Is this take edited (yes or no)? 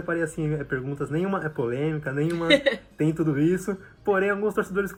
no